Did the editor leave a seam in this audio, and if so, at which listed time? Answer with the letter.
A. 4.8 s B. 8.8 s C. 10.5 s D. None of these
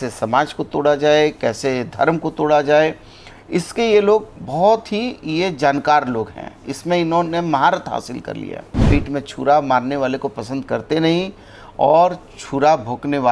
B